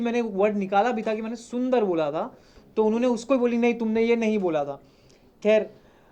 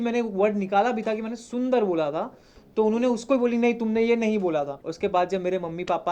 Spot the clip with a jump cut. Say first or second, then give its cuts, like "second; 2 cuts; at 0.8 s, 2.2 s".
second; 1 cut; at 4.8 s